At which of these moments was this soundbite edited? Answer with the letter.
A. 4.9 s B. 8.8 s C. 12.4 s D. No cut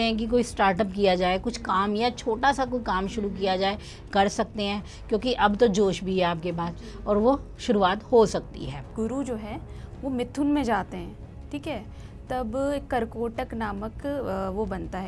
B